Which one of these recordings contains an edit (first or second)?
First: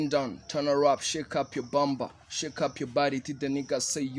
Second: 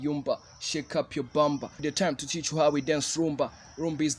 second